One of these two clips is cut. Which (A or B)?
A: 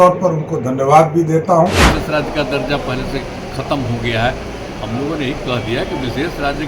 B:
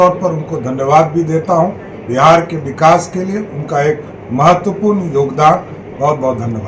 A